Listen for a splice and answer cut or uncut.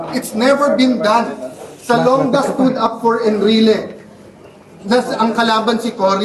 cut